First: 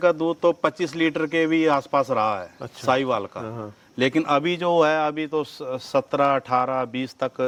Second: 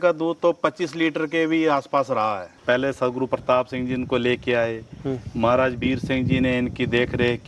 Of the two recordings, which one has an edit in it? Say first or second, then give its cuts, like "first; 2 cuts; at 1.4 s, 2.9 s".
second; 1 cut; at 2.5 s